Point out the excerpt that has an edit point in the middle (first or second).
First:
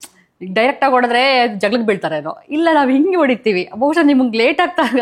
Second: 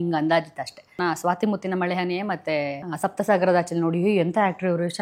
second